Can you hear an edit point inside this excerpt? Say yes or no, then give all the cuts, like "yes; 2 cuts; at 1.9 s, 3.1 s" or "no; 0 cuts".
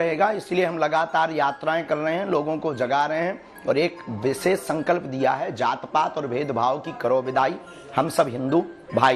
no; 0 cuts